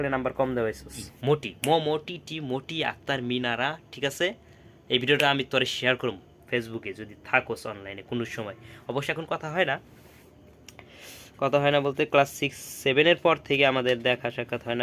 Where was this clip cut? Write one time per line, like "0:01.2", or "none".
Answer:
0:01.1